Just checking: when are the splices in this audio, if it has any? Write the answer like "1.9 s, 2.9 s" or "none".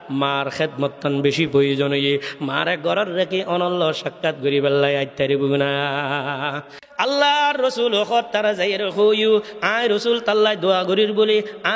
6.7 s